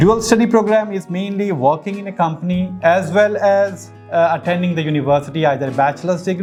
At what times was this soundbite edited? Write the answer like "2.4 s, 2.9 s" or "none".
none